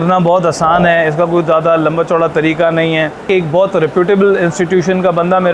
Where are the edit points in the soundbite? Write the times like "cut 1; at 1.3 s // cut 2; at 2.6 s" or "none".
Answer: cut 1; at 3.2 s